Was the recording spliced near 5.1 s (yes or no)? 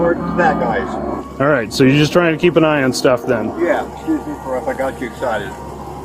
no